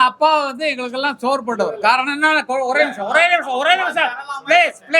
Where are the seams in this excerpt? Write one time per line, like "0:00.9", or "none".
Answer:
none